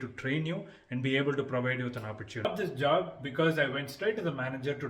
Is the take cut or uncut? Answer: cut